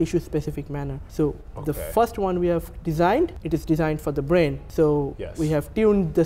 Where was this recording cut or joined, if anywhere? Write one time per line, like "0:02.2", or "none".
0:01.0
0:03.4
0:04.6